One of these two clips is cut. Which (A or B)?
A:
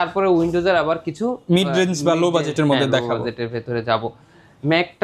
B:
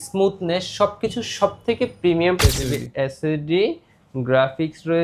B